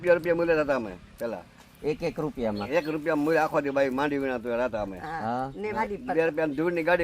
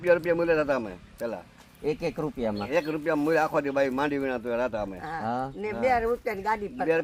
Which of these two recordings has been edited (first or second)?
first